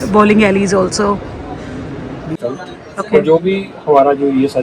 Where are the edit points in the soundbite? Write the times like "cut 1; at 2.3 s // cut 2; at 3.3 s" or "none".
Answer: cut 1; at 2.3 s